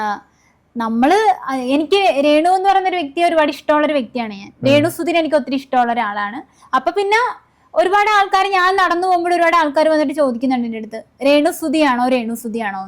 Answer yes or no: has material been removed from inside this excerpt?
no